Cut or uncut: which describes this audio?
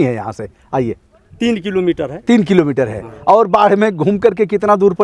uncut